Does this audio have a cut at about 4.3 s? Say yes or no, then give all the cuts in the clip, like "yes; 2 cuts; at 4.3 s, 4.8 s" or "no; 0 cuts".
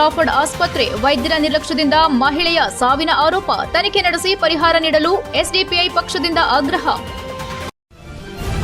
no; 1 cut; at 7.6 s